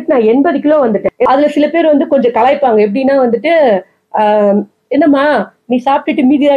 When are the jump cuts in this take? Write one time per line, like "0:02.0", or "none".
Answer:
0:01.2